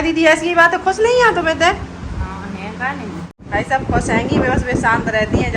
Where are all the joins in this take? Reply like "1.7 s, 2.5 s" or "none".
3.3 s